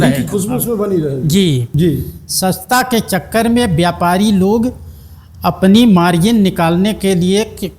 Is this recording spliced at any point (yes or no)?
yes